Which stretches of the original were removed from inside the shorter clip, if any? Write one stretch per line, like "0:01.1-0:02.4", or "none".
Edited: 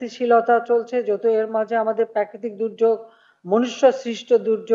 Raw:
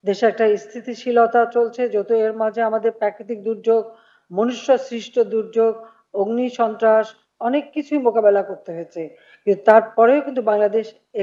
none